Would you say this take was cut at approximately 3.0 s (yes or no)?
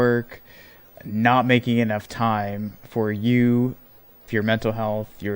no